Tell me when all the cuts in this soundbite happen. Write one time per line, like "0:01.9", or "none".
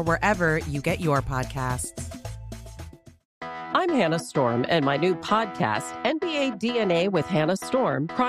0:03.3